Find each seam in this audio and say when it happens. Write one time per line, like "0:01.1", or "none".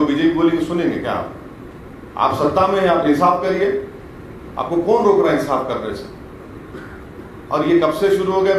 none